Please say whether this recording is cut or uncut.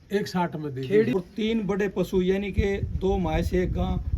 cut